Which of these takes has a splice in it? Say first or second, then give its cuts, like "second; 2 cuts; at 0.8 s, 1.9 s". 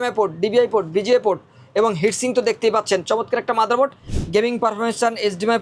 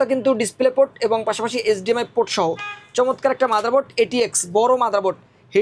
first; 1 cut; at 4.1 s